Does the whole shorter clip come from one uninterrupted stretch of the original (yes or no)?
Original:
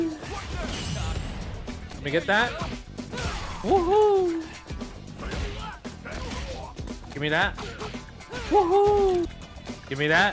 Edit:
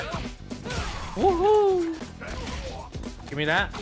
no